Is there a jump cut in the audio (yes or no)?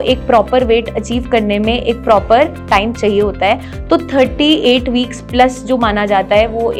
no